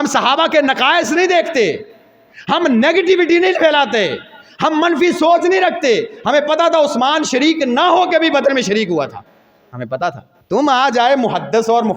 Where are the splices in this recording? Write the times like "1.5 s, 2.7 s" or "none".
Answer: 10.3 s